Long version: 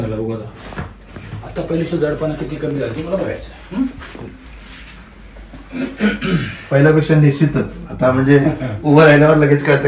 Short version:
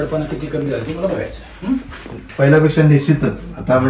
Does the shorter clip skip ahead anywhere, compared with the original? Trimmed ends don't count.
yes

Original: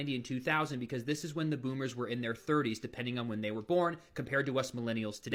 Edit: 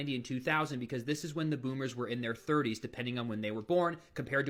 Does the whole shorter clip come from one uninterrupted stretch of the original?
yes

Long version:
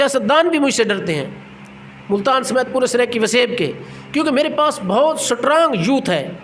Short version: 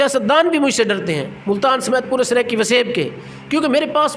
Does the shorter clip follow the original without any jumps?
no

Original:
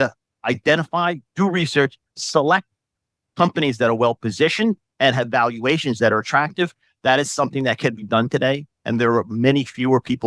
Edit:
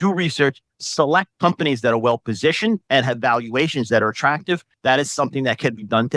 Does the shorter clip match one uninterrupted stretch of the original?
no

